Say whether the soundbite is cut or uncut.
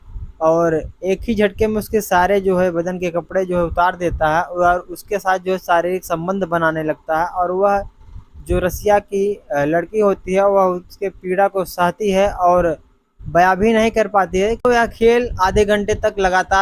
cut